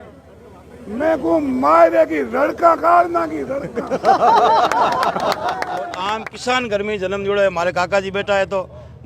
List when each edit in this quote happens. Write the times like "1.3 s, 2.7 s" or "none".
6.0 s